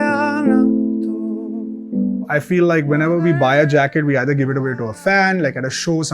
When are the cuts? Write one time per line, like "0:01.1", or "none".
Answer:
0:02.2